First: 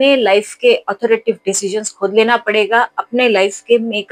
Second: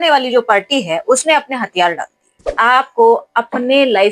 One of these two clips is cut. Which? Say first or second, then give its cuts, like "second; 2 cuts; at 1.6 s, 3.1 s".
second; 1 cut; at 2.5 s